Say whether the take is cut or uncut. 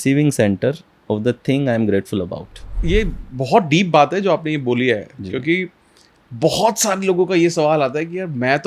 cut